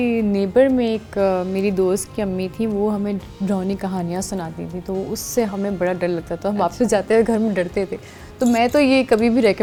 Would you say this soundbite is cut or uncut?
uncut